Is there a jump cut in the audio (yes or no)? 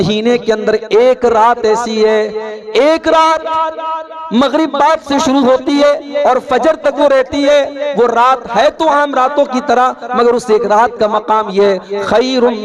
no